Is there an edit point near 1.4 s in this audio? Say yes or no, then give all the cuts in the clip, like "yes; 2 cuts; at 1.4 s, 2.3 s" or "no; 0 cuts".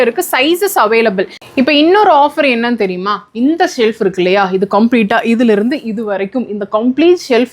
yes; 1 cut; at 1.4 s